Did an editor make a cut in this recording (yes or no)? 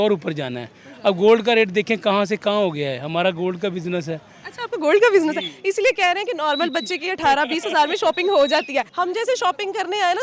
no